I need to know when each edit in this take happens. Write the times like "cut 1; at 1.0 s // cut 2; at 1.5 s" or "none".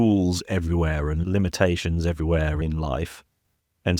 cut 1; at 1.2 s // cut 2; at 2.6 s